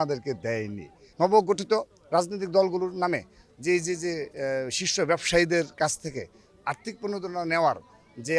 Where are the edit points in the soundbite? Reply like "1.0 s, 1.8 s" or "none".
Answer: 1.0 s